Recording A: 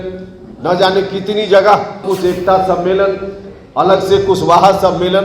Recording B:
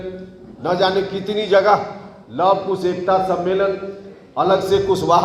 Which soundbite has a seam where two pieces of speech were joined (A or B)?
A